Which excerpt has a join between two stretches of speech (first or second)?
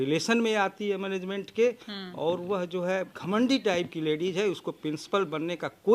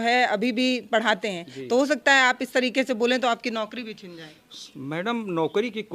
first